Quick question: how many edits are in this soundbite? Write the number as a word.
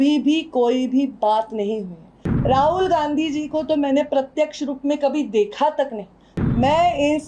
one